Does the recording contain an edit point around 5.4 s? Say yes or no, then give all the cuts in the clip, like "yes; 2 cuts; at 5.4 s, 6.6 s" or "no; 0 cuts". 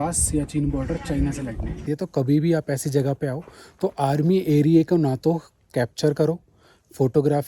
no; 1 cut; at 1.8 s